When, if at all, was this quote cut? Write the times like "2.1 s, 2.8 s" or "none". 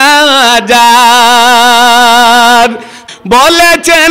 3.0 s